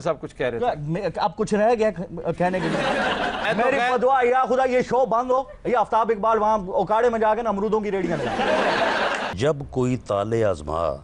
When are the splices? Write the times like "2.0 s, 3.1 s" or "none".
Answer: 3.5 s, 9.3 s